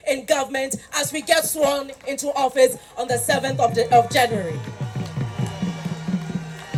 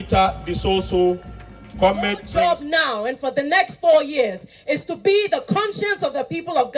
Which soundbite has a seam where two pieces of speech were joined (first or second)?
second